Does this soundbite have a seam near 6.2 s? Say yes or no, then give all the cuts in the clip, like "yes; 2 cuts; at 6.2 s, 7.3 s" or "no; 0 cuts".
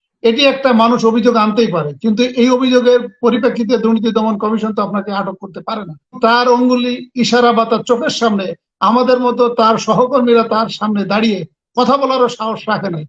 yes; 1 cut; at 6.2 s